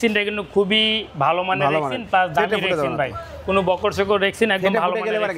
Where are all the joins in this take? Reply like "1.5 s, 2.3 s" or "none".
none